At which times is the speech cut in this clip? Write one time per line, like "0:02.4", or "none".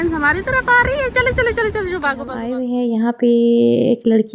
0:02.5

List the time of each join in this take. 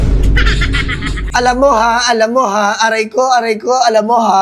0:01.2

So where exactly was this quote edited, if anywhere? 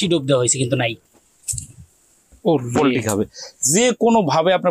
0:01.0

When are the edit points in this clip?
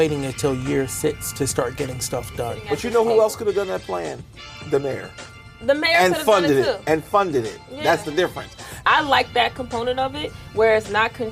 0:02.6
0:08.7

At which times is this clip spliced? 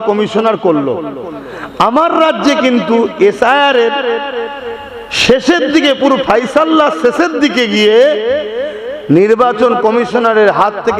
none

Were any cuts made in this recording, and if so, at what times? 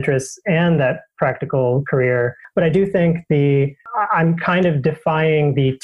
0:02.4

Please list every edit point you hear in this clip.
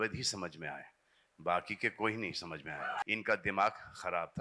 0:03.0

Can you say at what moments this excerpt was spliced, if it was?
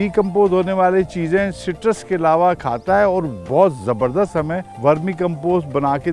0:04.6

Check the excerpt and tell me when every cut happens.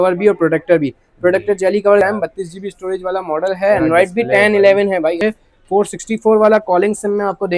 0:02.0
0:05.2

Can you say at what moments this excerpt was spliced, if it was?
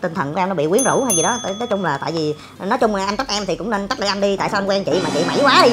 none

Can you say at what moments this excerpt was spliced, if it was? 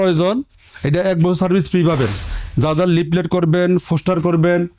0:02.2

